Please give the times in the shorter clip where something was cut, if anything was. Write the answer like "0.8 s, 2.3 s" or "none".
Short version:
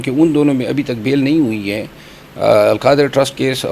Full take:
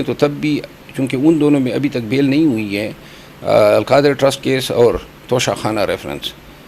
none